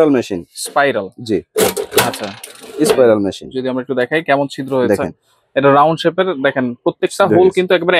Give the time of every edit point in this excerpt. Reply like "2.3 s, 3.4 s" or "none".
none